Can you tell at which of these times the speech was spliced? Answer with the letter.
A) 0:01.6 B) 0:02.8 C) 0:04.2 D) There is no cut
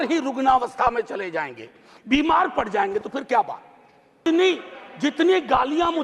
C